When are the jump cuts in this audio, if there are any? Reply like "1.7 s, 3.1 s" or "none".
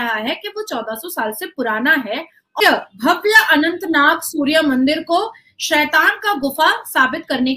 2.6 s